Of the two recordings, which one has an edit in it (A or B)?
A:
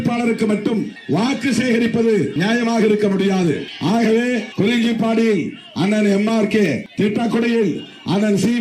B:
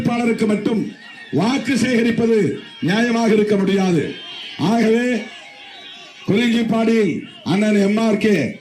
A